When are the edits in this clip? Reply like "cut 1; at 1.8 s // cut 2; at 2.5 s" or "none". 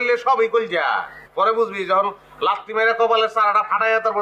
cut 1; at 1.2 s